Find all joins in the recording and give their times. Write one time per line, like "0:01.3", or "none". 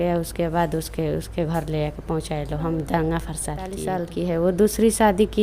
0:04.1